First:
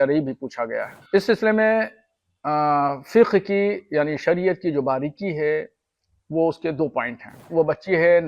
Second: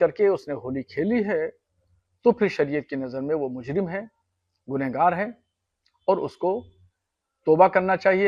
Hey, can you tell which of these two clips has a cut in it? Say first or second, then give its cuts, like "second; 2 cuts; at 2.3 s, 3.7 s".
first; 2 cuts; at 1.0 s, 7.5 s